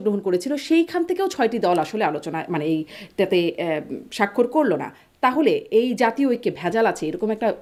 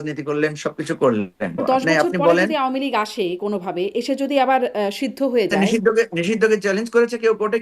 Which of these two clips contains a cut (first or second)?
second